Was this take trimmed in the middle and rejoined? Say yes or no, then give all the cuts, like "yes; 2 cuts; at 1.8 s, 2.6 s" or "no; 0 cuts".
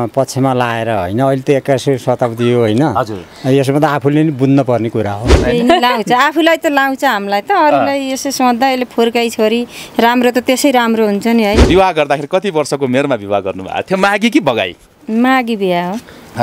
yes; 2 cuts; at 5.3 s, 11.6 s